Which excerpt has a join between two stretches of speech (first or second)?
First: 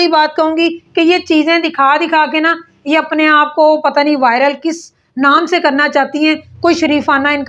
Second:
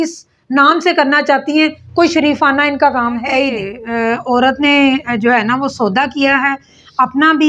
second